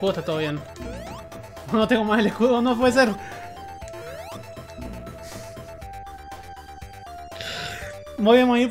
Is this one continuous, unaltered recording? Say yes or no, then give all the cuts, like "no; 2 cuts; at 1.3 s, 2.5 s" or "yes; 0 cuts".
yes; 0 cuts